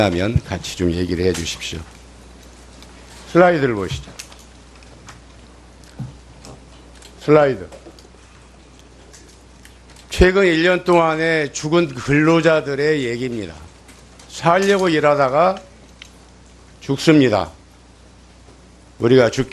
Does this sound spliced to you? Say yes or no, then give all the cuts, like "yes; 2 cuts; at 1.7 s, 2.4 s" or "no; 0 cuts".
no; 0 cuts